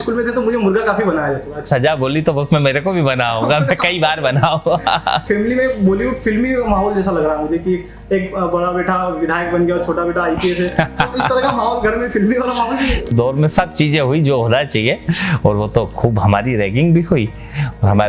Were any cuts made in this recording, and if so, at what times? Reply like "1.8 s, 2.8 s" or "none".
1.7 s, 5.2 s, 13.1 s